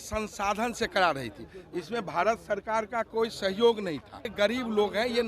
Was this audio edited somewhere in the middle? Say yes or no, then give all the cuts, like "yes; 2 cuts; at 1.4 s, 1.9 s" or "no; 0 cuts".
yes; 1 cut; at 4.3 s